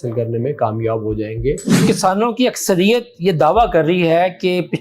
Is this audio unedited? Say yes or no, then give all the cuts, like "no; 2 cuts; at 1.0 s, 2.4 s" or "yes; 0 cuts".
no; 1 cut; at 1.8 s